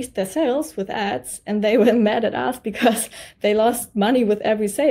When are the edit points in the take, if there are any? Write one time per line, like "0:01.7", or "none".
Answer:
none